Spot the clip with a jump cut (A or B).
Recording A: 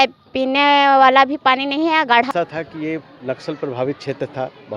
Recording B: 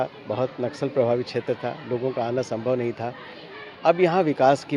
A